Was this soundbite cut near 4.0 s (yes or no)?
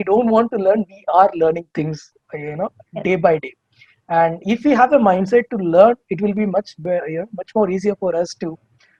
no